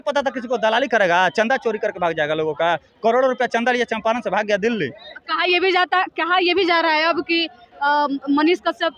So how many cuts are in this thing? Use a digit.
0